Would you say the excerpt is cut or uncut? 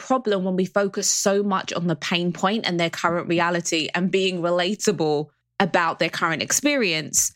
cut